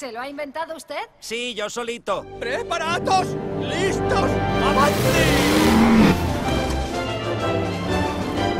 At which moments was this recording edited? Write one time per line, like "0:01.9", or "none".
0:05.5